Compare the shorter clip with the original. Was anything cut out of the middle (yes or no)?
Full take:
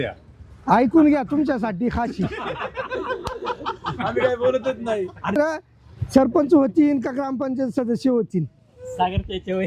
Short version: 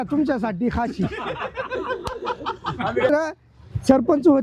yes